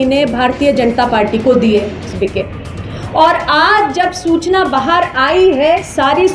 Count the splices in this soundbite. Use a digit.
1